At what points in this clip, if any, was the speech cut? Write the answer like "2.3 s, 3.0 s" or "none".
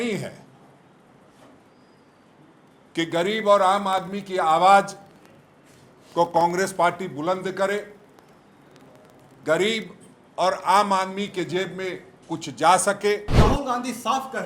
13.4 s